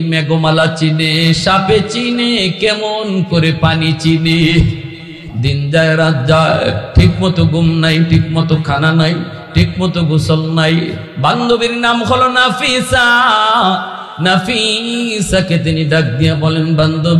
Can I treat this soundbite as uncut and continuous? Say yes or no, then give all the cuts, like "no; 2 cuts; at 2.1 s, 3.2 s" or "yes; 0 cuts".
no; 1 cut; at 5.3 s